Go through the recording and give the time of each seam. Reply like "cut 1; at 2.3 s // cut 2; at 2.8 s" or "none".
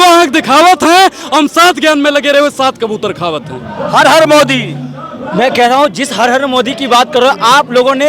none